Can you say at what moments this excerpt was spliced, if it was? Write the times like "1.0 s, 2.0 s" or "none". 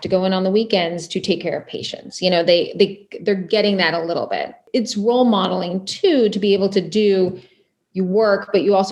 4.6 s

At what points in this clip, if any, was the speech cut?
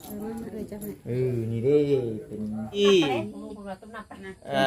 2.8 s

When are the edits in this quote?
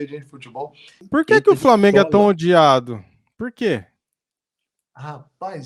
1.1 s

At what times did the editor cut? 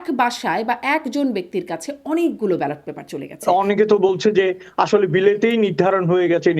3.4 s

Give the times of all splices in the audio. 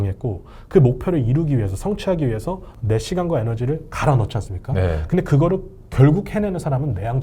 2.7 s

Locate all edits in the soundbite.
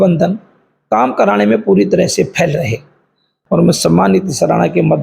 3.3 s

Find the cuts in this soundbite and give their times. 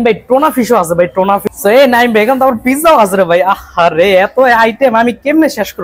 1.4 s

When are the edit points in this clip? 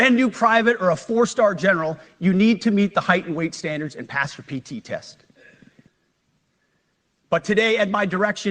5.9 s

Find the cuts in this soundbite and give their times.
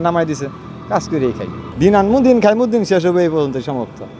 none

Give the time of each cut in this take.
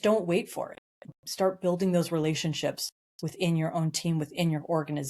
1.1 s

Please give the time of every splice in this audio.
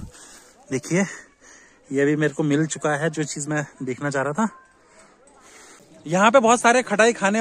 6.0 s

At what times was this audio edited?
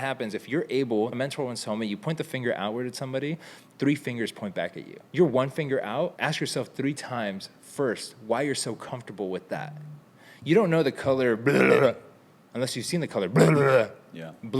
1.1 s, 5.0 s, 6.2 s

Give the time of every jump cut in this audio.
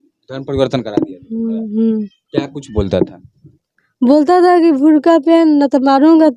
none

